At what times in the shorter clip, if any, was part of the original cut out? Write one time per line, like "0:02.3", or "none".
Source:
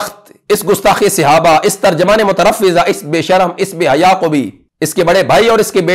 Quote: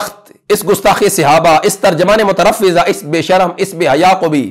none